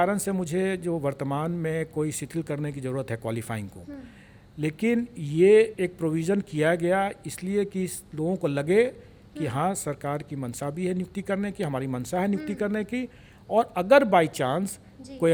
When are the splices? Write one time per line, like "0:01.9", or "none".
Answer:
none